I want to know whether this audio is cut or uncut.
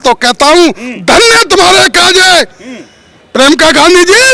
uncut